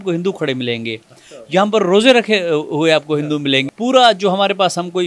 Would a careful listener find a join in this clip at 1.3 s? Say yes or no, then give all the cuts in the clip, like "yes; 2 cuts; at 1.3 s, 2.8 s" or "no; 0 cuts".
no; 1 cut; at 3.7 s